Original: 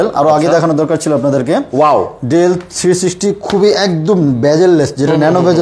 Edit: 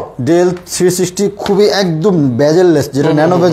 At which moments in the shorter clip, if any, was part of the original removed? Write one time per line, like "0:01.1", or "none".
none